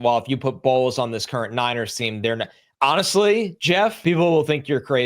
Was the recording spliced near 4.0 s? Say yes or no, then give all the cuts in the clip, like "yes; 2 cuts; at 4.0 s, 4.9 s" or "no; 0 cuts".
yes; 1 cut; at 4.0 s